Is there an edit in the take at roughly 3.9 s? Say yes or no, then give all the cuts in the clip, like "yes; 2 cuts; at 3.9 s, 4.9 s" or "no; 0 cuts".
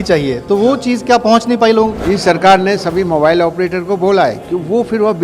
no; 1 cut; at 2.0 s